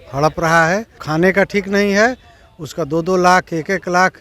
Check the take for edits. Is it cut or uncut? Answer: cut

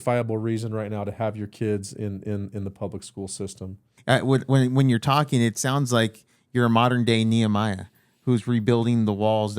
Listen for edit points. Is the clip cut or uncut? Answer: cut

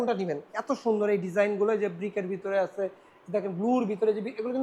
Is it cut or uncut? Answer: uncut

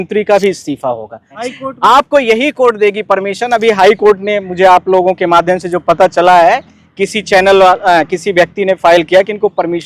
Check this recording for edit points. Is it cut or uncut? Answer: cut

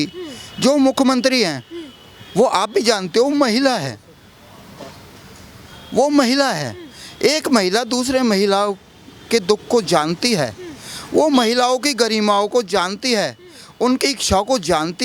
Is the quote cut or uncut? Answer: uncut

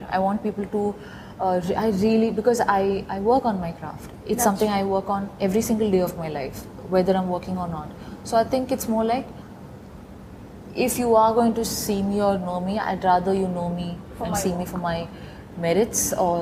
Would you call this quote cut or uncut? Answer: uncut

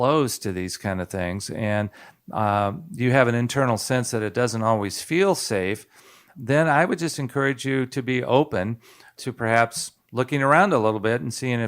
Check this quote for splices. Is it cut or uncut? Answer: cut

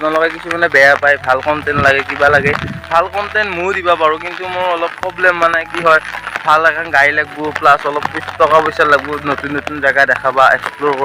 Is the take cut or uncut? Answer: uncut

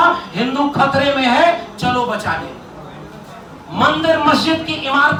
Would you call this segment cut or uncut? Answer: uncut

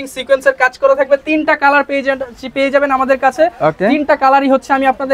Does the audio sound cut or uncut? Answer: uncut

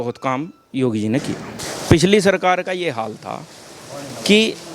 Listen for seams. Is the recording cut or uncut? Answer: cut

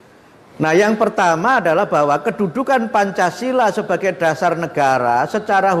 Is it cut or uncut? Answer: uncut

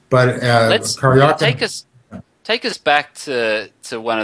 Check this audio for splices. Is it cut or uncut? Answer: cut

